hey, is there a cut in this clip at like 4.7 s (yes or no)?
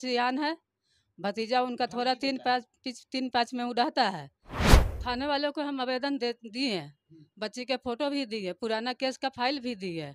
yes